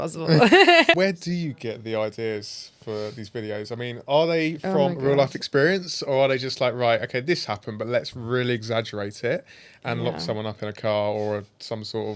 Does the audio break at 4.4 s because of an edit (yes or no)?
no